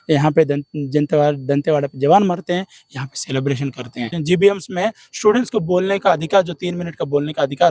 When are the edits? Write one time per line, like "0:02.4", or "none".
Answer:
0:04.1